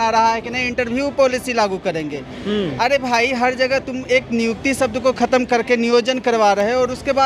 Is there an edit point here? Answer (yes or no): no